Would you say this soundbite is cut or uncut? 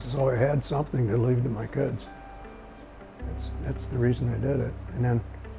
uncut